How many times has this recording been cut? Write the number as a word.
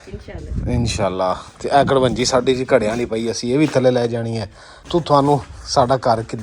one